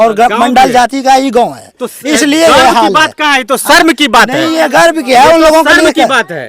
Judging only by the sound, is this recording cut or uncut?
uncut